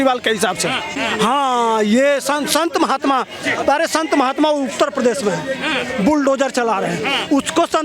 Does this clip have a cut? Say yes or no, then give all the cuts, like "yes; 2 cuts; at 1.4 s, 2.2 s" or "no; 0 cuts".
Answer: yes; 1 cut; at 0.9 s